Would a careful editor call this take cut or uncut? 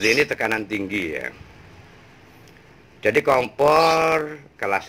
uncut